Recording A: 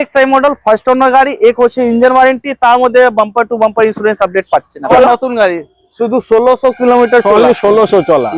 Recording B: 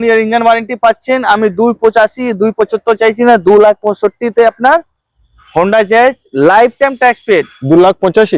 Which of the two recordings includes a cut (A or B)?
A